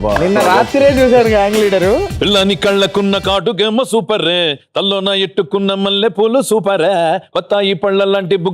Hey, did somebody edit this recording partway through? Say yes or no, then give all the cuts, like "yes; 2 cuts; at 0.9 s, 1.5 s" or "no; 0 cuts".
yes; 1 cut; at 2.1 s